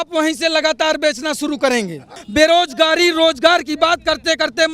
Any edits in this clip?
no; 0 cuts

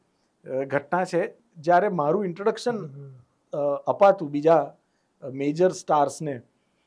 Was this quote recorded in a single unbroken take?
no; 1 cut; at 1.4 s

